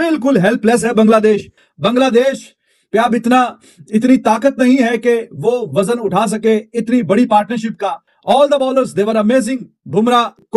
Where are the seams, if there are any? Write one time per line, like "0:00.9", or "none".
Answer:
none